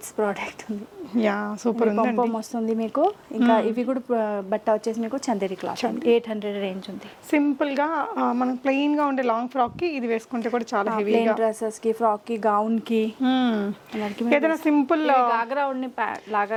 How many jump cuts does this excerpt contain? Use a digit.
0